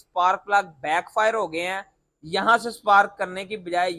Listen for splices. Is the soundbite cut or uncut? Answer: uncut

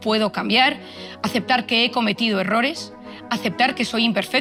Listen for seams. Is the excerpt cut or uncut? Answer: uncut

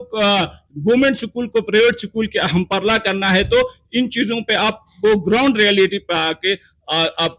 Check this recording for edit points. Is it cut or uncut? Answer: uncut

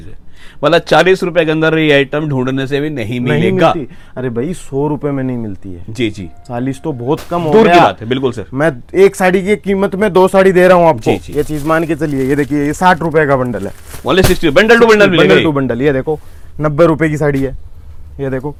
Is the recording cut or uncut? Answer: uncut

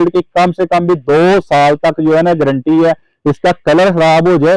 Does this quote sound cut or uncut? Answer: uncut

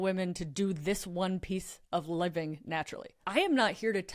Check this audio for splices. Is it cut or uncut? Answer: cut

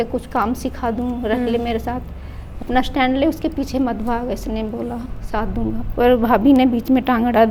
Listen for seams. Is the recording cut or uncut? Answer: uncut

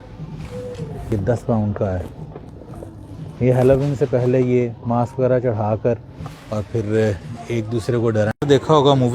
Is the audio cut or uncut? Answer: cut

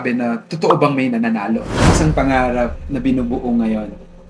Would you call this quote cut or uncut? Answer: cut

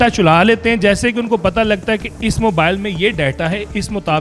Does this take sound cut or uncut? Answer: uncut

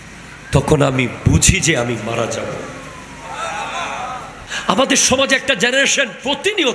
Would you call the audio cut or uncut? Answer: cut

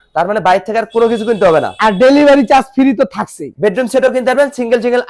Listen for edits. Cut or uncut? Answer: cut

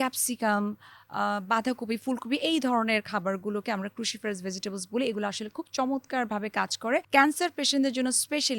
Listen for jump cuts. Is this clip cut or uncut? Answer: cut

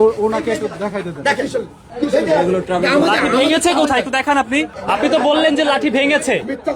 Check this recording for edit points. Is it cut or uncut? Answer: cut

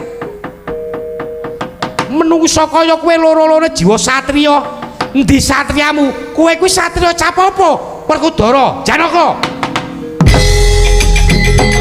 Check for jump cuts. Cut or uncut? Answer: uncut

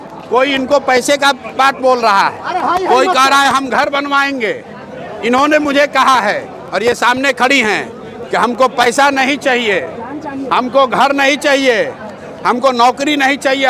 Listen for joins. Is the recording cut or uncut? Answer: uncut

